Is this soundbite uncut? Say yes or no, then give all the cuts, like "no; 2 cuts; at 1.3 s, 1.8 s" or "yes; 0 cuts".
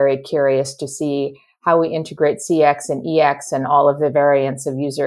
yes; 0 cuts